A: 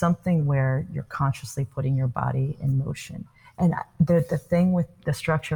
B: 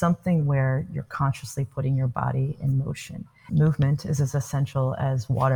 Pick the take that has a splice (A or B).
B